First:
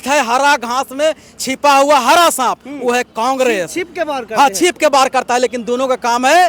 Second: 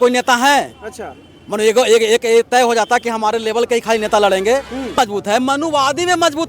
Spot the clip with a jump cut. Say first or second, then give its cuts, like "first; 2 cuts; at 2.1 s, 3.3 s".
second; 1 cut; at 4.9 s